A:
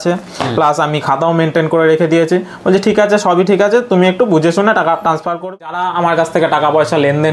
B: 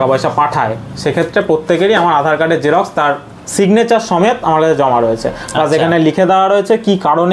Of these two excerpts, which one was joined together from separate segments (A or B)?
A